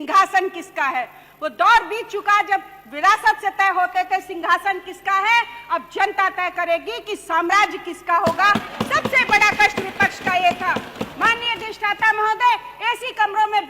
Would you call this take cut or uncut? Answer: uncut